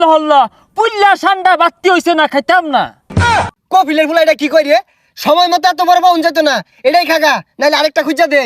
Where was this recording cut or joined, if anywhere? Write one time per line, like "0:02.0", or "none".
0:03.2